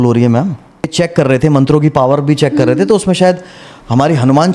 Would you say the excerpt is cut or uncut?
cut